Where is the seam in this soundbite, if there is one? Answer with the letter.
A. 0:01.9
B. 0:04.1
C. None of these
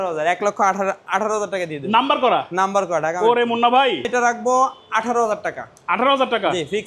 B